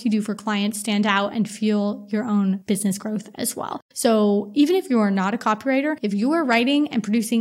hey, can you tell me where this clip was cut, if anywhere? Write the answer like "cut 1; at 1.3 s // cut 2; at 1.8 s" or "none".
cut 1; at 2.6 s // cut 2; at 3.8 s // cut 3; at 6.0 s